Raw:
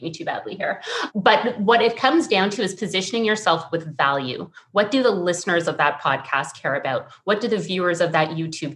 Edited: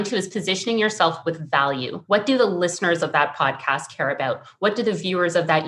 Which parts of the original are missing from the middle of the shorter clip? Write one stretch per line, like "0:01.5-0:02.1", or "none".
0:04.4-0:04.6